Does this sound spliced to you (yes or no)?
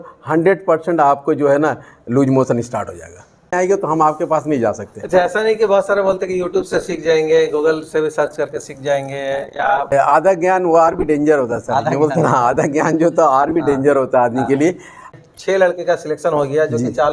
yes